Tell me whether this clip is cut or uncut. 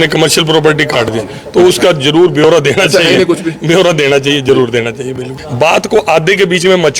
cut